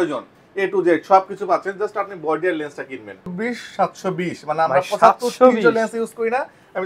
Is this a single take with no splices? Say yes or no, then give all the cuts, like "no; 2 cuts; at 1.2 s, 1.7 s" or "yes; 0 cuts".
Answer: no; 1 cut; at 3.3 s